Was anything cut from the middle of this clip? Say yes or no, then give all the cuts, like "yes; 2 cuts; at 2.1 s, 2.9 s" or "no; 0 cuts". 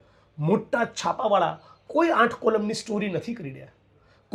no; 0 cuts